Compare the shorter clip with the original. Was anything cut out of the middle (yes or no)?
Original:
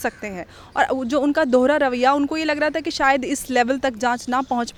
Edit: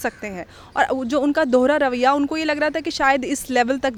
no